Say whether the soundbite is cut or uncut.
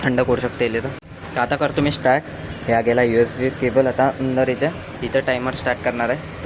cut